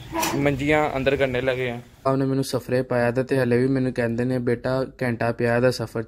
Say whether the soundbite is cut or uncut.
cut